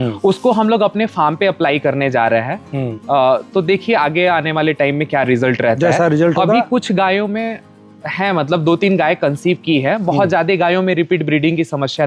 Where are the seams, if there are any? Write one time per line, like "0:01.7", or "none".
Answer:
none